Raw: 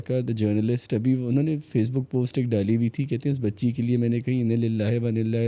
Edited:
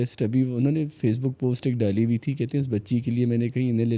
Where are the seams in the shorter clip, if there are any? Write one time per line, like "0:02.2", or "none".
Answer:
none